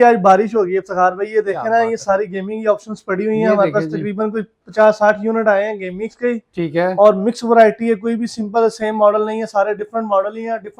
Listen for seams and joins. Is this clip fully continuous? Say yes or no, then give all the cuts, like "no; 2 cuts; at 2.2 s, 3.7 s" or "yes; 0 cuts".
yes; 0 cuts